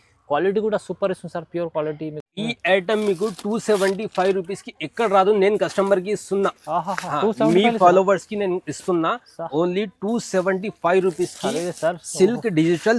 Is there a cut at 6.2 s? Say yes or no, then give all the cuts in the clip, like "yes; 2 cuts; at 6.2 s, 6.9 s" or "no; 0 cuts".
no; 1 cut; at 2.3 s